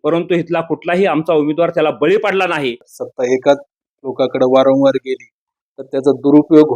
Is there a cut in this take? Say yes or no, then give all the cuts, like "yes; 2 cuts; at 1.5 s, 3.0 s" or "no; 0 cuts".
yes; 1 cut; at 2.9 s